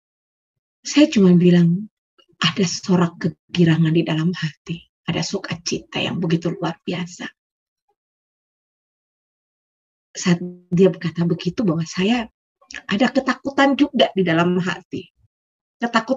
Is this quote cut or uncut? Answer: uncut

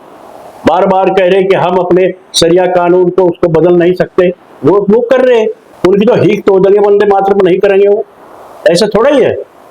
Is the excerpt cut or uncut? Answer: cut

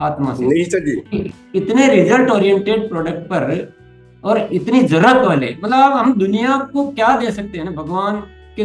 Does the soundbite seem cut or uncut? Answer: uncut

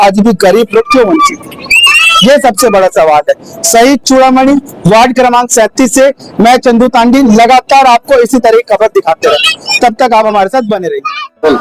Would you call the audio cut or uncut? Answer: uncut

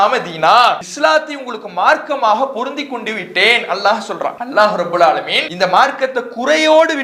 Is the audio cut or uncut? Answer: cut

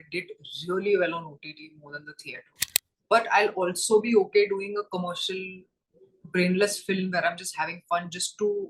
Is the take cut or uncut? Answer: cut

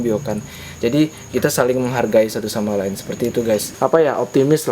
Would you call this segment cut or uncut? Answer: cut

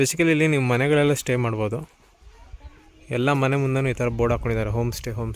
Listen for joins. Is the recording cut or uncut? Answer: uncut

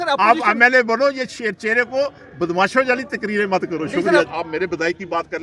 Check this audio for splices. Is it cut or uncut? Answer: cut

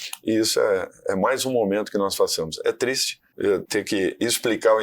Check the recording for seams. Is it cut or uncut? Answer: cut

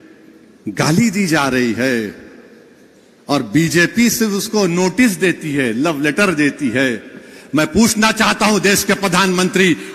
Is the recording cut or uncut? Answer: uncut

